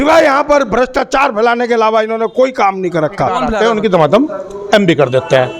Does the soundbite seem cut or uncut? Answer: cut